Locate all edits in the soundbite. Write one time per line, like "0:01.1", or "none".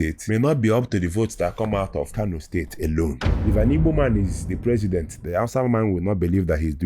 0:02.1
0:03.3